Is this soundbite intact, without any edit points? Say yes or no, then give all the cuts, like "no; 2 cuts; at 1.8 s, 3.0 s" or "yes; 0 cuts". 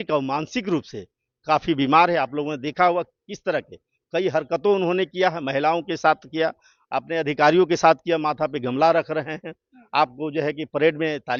yes; 0 cuts